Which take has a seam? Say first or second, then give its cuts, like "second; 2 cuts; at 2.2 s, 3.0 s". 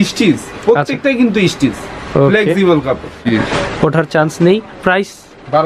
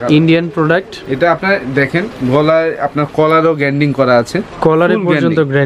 first; 1 cut; at 3.2 s